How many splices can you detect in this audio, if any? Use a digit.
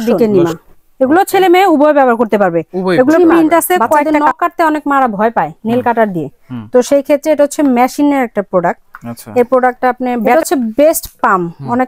2